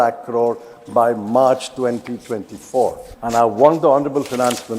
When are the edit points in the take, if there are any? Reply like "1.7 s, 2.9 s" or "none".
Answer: 3.1 s